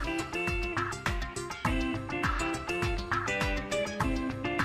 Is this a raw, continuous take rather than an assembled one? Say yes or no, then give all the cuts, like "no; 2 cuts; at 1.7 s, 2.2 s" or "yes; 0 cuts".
no; 1 cut; at 0.9 s